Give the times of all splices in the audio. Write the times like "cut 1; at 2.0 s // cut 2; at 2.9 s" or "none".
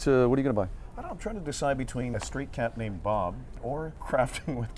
cut 1; at 2.1 s // cut 2; at 3.6 s

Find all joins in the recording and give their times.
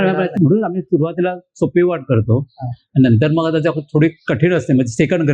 none

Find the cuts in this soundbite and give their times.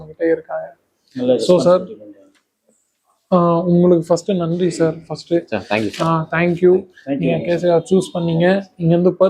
none

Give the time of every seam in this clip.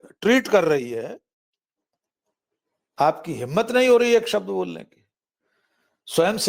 none

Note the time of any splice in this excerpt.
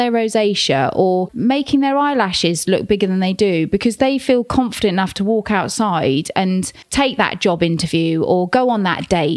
cut 1; at 1.2 s // cut 2; at 6.8 s

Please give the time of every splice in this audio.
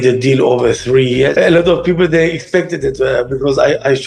cut 1; at 1.3 s

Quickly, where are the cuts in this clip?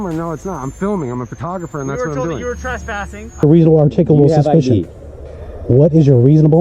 cut 1; at 3.4 s

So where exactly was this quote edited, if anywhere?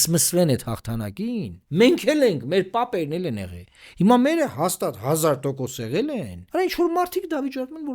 cut 1; at 1.6 s // cut 2; at 6.4 s

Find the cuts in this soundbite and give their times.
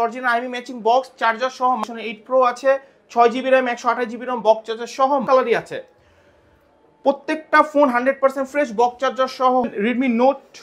cut 1; at 1.8 s // cut 2; at 5.2 s // cut 3; at 9.7 s

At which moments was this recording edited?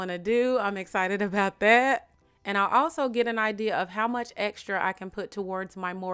none

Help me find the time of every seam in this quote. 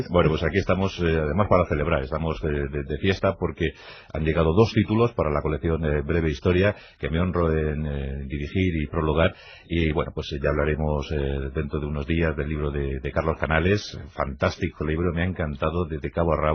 none

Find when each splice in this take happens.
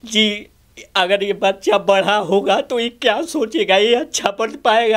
none

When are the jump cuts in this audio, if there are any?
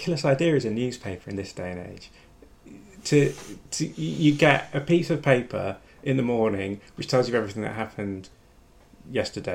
none

